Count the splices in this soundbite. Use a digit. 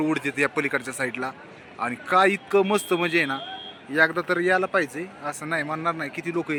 0